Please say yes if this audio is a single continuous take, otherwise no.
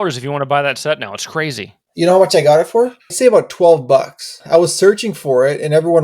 no